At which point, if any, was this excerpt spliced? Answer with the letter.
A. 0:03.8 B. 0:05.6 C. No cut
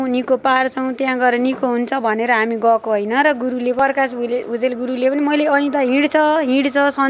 A